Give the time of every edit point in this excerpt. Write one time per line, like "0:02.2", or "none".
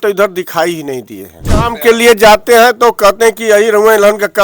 0:01.4